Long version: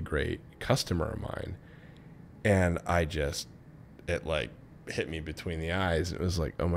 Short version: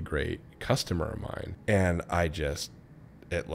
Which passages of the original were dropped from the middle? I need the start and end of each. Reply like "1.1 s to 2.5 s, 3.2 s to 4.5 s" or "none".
1.5 s to 2.3 s